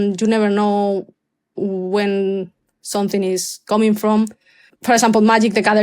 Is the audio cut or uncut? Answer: cut